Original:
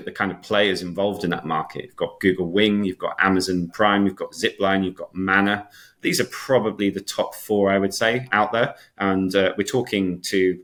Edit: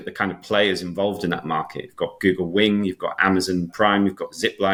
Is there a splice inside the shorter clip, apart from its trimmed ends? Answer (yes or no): no